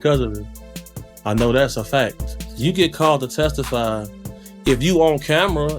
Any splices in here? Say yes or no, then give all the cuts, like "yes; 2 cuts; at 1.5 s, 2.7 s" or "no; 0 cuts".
yes; 1 cut; at 2.5 s